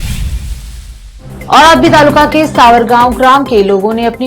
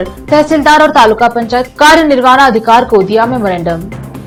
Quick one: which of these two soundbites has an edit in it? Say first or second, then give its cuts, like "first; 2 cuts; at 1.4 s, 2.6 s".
first; 1 cut; at 0.9 s